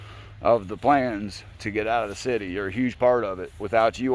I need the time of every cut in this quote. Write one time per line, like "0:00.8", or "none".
none